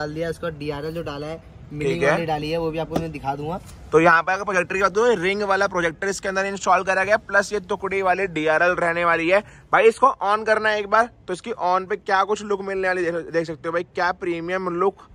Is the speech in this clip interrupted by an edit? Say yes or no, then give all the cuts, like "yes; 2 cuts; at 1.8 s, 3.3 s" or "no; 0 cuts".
no; 0 cuts